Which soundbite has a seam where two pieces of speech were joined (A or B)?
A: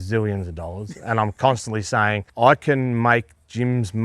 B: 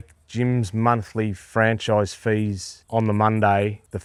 A